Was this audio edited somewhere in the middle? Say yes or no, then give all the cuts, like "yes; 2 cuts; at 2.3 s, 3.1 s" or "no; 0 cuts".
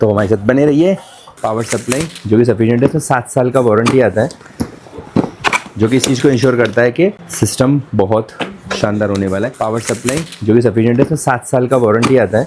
yes; 2 cuts; at 1.3 s, 9.5 s